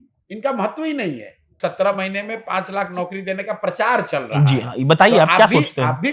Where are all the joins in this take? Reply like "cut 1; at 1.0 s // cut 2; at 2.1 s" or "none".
cut 1; at 1.5 s